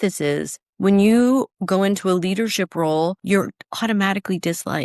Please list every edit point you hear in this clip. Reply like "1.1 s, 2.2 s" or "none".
3.2 s